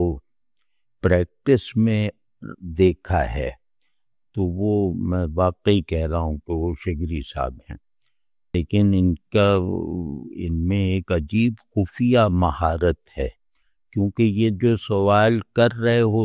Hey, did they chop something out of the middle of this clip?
yes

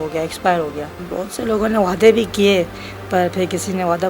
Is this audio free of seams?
no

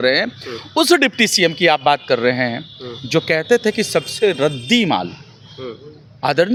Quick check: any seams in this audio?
no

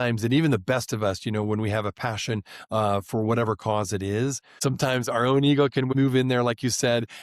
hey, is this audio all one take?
no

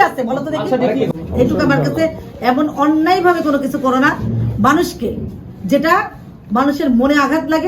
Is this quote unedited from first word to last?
no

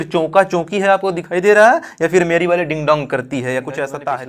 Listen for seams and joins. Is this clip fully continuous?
yes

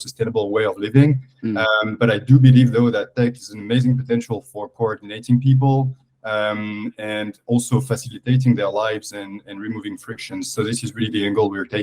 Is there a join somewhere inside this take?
no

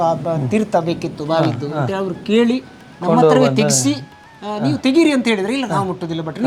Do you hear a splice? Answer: no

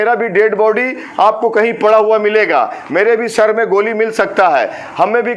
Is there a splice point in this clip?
no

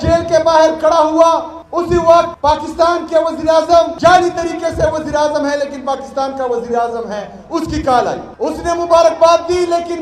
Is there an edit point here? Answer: yes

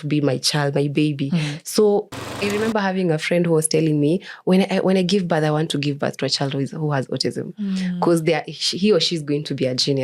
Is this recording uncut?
no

